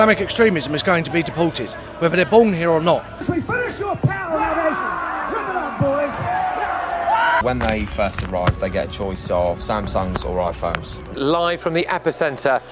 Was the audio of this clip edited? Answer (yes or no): yes